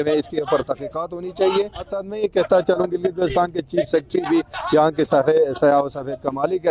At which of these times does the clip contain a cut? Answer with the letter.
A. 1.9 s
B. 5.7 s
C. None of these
A